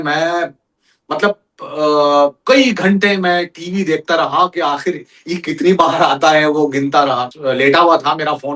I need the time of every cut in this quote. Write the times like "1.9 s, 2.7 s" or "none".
7.3 s